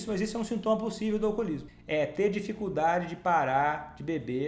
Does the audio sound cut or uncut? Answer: cut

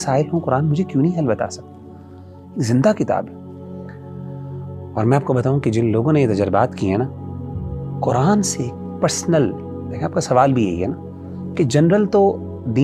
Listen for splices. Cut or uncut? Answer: uncut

